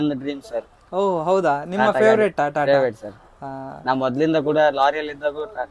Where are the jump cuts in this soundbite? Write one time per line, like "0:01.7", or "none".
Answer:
none